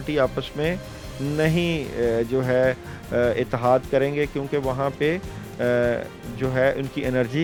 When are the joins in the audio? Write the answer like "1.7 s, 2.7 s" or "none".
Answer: none